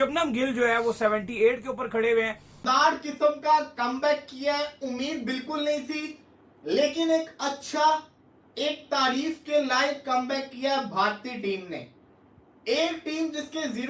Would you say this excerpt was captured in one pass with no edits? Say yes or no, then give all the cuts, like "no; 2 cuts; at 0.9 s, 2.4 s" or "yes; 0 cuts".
no; 1 cut; at 2.6 s